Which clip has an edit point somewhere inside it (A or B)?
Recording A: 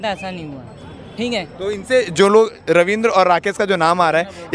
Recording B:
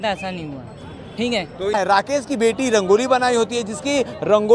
B